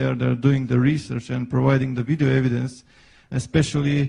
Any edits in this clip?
no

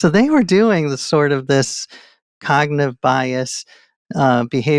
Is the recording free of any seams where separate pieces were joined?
yes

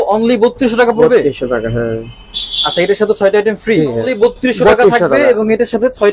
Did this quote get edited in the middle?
yes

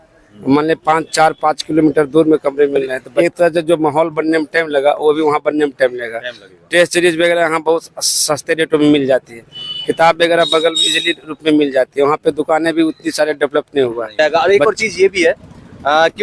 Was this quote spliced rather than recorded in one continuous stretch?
yes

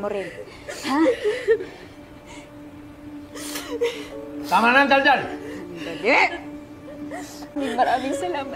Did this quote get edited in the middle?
yes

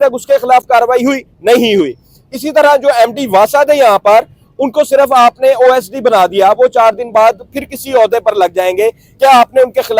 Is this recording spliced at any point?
no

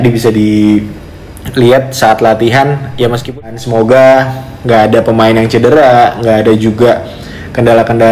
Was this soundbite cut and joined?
yes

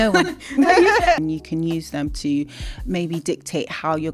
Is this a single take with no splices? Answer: no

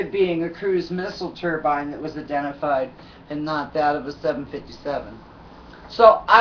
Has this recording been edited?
yes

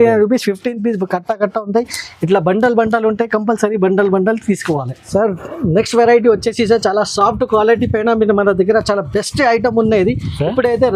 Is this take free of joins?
yes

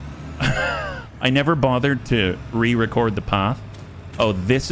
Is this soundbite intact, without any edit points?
no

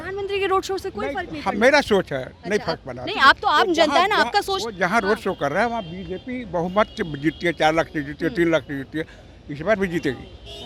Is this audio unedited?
yes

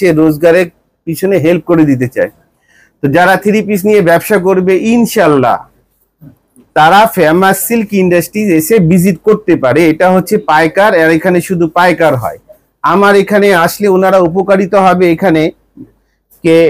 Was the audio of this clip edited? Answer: no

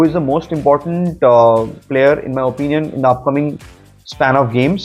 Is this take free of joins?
yes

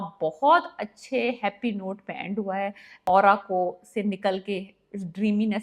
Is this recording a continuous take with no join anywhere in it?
no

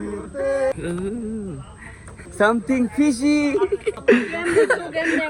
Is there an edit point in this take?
yes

